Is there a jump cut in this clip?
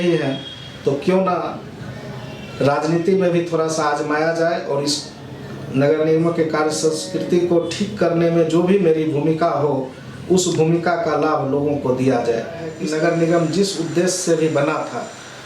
yes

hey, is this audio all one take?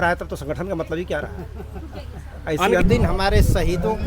no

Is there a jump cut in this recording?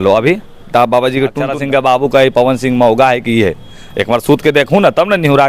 yes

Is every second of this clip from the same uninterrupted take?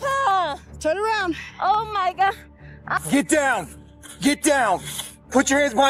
no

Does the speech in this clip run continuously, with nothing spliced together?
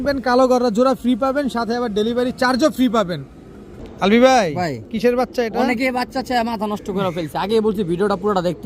yes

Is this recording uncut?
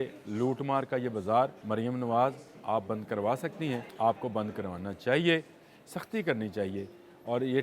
no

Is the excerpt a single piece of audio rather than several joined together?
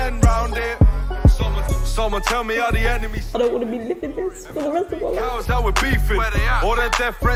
yes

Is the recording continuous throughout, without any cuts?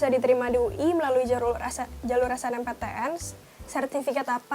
yes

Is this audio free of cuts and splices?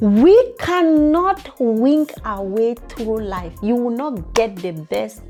yes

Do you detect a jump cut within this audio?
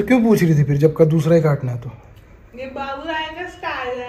no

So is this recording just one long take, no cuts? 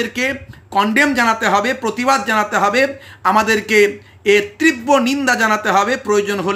yes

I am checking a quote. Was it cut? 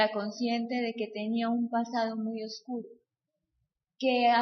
yes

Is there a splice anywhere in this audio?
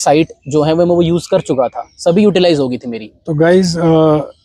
no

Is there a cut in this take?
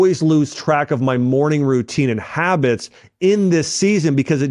no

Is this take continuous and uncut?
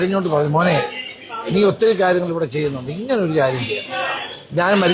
yes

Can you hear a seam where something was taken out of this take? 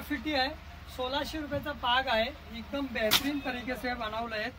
no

